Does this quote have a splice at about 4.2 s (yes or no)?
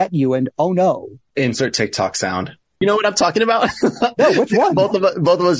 no